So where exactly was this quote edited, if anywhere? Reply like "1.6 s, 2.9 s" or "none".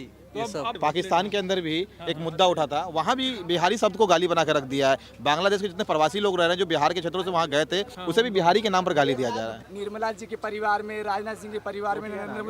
0.8 s, 7.9 s, 9.7 s